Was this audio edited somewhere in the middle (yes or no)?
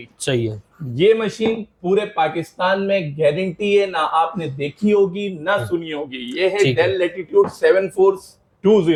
no